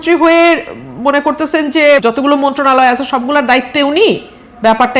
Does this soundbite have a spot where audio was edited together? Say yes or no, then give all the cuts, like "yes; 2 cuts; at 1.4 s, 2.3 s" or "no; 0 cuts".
yes; 1 cut; at 2.0 s